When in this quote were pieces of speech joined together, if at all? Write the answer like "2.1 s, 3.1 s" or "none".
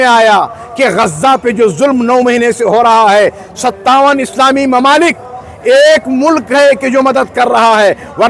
none

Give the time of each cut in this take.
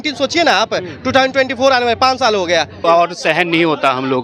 2.8 s

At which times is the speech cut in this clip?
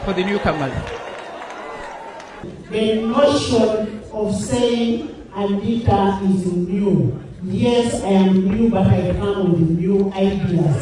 2.5 s

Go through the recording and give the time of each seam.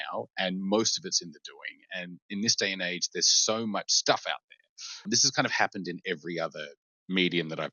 4.9 s

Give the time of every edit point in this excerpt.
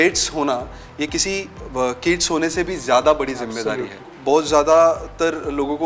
4.1 s

